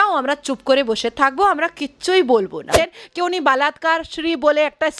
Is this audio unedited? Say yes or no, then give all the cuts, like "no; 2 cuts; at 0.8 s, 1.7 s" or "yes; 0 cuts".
no; 1 cut; at 2.9 s